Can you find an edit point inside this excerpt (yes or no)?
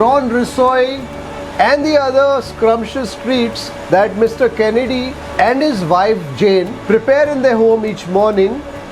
yes